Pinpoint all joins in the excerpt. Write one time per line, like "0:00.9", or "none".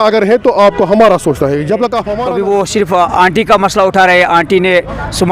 0:01.7